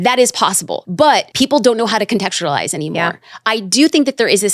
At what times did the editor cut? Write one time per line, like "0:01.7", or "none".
0:01.2